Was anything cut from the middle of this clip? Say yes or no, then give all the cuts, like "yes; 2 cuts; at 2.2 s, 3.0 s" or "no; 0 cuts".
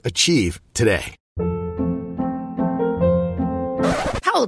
no; 0 cuts